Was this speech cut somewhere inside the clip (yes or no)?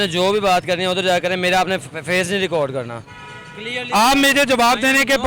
no